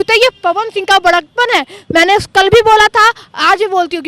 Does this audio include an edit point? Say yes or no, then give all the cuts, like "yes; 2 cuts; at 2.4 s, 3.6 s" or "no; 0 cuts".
no; 0 cuts